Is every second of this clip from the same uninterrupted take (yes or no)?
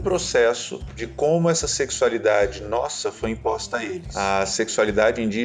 no